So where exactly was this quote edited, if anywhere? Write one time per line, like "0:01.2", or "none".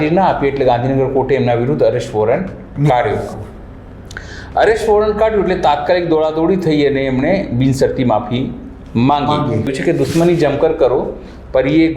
0:09.7